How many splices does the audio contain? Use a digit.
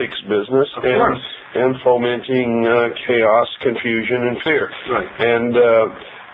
1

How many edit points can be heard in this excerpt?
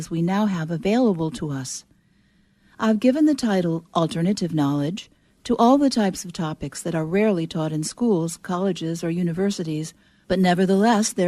1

